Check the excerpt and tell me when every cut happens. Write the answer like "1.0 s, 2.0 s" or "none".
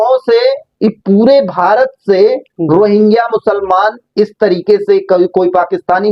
none